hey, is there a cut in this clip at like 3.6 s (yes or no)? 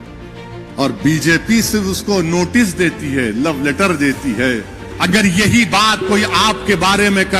no